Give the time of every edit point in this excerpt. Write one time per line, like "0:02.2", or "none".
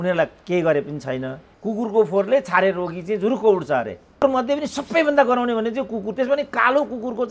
0:01.4
0:04.2